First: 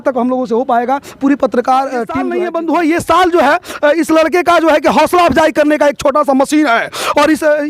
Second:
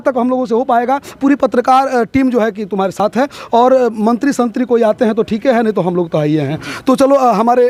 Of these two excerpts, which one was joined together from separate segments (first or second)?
first